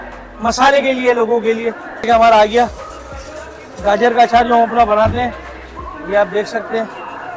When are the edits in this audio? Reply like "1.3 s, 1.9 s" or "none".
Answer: 2.1 s